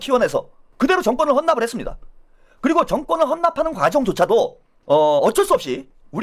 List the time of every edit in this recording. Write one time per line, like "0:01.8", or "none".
none